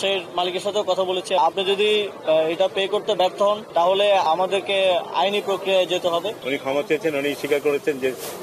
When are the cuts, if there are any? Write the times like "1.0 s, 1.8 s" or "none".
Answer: 1.4 s, 4.2 s, 6.4 s